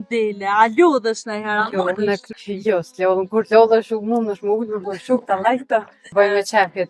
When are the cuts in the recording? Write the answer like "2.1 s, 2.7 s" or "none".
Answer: 2.2 s, 6.1 s